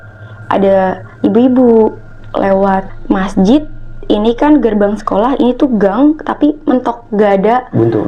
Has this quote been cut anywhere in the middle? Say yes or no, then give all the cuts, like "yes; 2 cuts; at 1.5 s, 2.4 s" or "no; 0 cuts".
yes; 1 cut; at 2.9 s